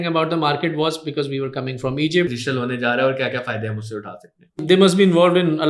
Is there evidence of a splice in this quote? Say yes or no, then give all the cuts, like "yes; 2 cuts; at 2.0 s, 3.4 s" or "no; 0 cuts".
yes; 2 cuts; at 2.4 s, 4.6 s